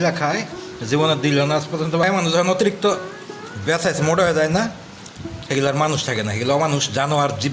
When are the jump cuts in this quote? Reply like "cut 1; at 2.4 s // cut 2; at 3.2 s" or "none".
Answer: cut 1; at 2.0 s